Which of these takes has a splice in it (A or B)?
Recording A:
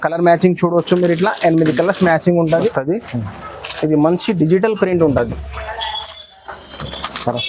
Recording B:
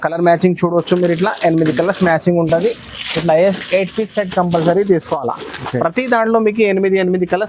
A